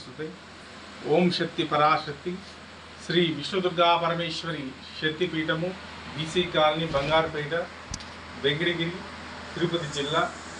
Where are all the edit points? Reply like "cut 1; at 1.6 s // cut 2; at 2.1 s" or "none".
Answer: none